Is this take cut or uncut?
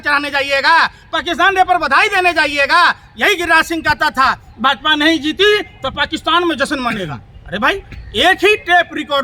uncut